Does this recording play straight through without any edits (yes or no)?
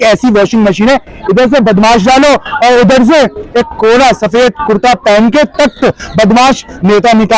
yes